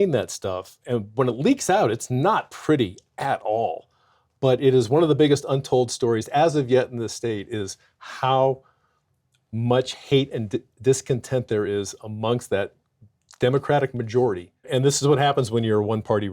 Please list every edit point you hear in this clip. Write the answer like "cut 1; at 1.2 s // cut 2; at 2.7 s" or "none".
cut 1; at 14.7 s